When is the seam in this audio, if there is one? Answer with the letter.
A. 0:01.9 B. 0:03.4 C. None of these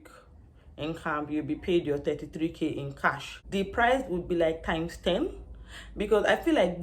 B